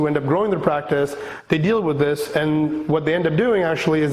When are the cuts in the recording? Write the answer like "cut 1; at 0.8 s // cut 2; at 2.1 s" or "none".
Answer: none